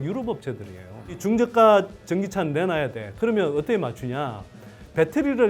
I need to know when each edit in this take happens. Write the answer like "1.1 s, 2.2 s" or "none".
1.2 s

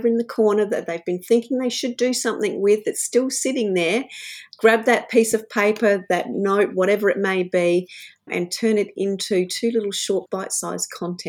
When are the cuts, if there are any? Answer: 4.4 s, 8.3 s, 10.3 s

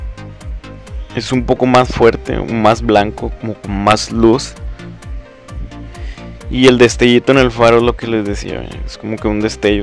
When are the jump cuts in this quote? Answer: 8.9 s

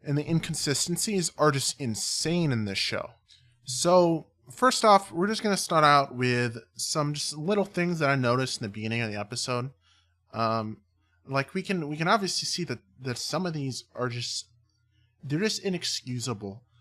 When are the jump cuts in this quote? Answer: 8.0 s

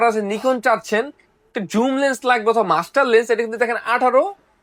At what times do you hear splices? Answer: none

